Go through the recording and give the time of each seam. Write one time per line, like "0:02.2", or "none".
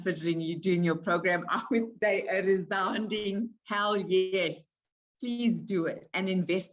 none